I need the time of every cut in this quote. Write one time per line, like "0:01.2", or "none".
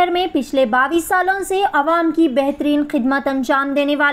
none